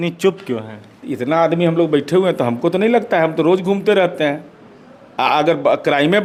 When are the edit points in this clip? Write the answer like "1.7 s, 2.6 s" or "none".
none